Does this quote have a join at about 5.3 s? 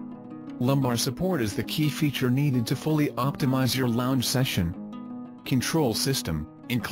yes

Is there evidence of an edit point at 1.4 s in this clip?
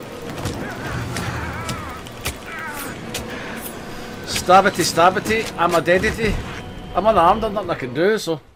no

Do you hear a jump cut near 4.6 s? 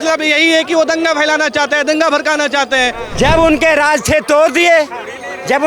no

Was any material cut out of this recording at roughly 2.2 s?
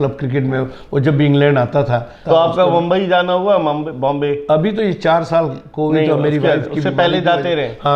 yes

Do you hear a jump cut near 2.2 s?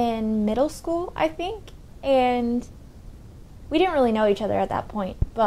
no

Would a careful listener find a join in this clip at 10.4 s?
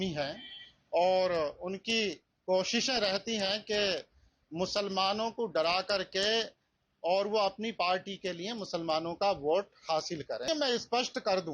yes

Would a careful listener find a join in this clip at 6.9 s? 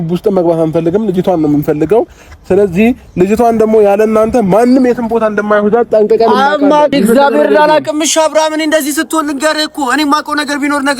yes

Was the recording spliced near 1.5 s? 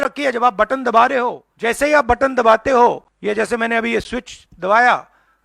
yes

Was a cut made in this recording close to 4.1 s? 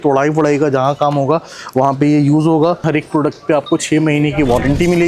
no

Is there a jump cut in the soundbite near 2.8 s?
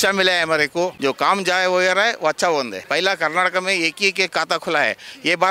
yes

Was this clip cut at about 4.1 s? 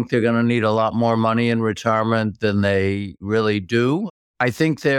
yes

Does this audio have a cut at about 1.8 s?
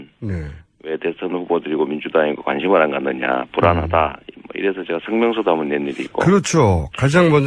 no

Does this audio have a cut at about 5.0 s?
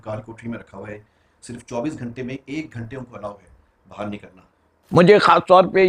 yes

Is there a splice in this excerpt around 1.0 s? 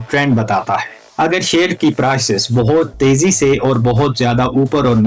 yes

